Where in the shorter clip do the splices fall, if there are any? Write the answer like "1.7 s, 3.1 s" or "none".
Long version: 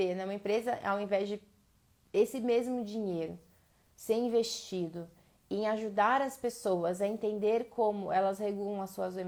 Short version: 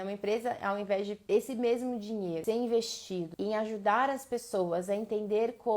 1.2 s, 2.4 s, 3.3 s